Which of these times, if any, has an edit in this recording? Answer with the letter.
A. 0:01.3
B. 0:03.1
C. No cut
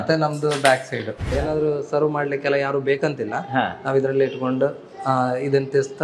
A